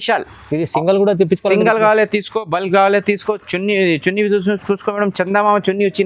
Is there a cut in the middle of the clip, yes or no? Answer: no